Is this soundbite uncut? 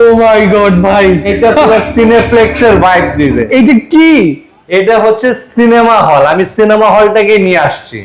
no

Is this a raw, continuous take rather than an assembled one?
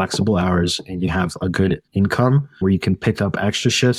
no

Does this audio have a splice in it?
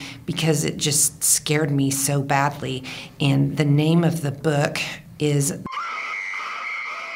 yes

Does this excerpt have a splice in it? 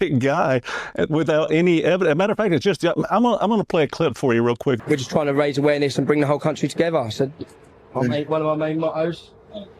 yes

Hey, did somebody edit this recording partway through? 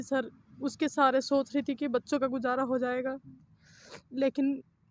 no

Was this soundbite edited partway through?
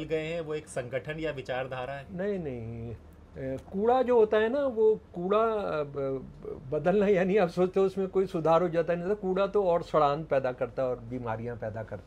no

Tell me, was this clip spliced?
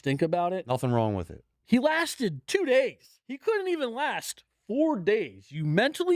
yes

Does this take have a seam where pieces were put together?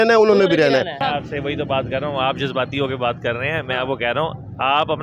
yes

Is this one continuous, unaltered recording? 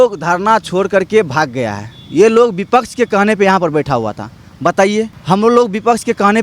no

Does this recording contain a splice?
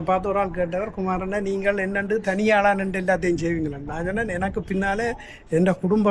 no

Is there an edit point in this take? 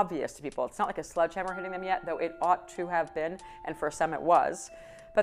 no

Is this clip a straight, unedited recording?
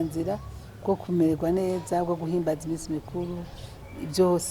yes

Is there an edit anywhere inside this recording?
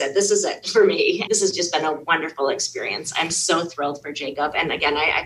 yes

